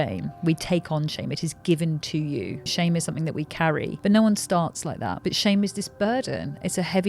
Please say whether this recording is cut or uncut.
cut